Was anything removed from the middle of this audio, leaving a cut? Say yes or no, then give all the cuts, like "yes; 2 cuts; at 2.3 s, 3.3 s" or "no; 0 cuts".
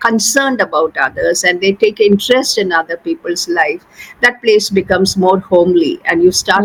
no; 0 cuts